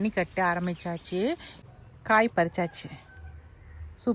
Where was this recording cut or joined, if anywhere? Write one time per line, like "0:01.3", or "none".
0:01.5